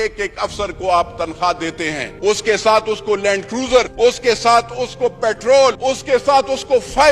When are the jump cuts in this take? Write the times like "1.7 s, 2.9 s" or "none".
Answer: 2.0 s, 3.9 s, 5.8 s